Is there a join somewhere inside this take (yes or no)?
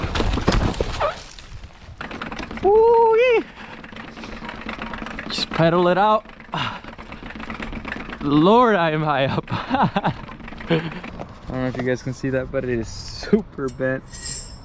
yes